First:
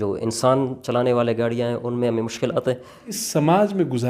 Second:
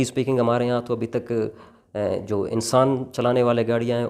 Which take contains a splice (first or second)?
first